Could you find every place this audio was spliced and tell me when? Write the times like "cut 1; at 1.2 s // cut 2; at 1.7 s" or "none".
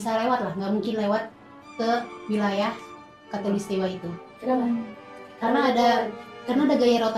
none